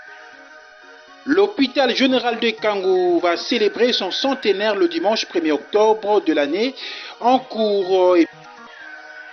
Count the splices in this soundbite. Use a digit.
2